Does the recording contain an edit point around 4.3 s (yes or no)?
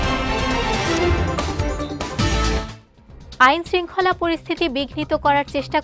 no